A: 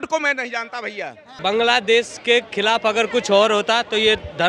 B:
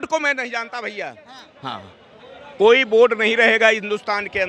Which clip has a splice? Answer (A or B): A